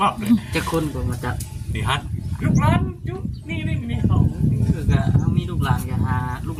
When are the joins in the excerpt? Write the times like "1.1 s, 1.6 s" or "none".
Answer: none